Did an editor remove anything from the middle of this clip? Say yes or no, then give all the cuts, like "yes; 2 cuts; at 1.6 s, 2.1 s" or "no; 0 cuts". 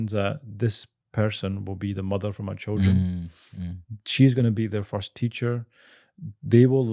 no; 0 cuts